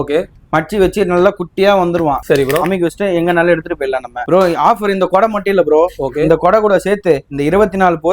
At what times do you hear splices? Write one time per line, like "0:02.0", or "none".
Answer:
0:02.2
0:04.2